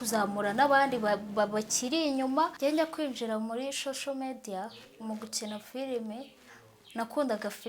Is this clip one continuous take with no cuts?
no; 1 cut; at 2.5 s

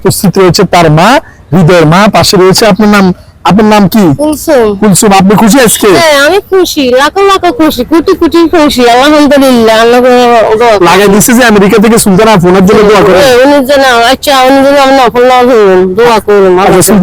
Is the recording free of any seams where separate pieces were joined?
yes; 0 cuts

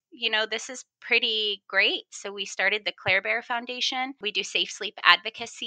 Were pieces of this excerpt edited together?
yes; 1 cut; at 4.2 s

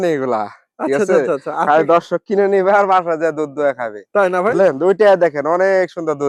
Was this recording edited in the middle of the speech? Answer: no; 0 cuts

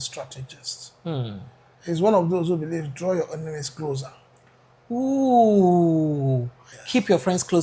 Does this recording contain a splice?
no; 0 cuts

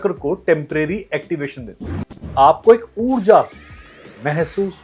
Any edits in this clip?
yes; 1 cut; at 2.2 s

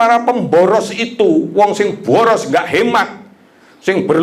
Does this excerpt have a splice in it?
no; 0 cuts

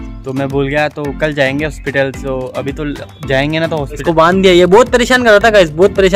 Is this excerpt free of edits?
no; 1 cut; at 4.0 s

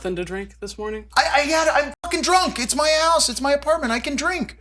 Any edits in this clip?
yes; 1 cut; at 1.1 s

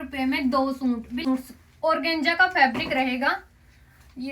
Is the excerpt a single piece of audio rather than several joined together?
no; 1 cut; at 1.2 s

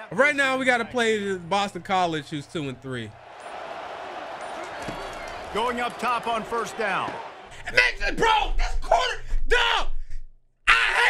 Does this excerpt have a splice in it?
no; 0 cuts

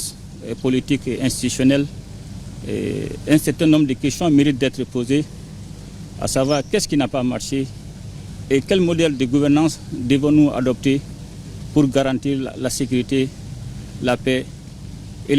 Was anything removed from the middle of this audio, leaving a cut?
no; 0 cuts

